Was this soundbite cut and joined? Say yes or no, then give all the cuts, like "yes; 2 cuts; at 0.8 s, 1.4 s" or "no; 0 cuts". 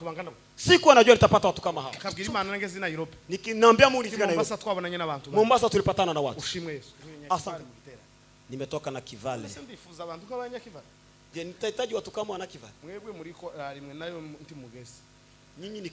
yes; 2 cuts; at 1.9 s, 7.5 s